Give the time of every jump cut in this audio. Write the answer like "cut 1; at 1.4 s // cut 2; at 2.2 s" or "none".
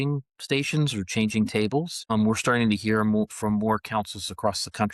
cut 1; at 2.0 s